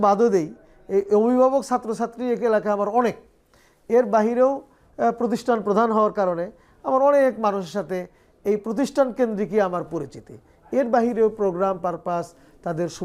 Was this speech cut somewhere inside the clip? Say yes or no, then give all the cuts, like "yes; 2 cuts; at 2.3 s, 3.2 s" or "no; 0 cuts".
no; 0 cuts